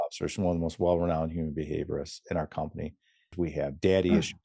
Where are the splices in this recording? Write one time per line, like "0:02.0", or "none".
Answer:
0:03.3